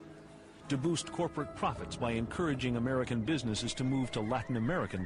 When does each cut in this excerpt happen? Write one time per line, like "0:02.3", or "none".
none